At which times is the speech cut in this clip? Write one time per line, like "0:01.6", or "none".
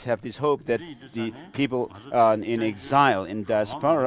0:03.0